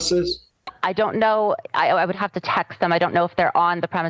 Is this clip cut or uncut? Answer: uncut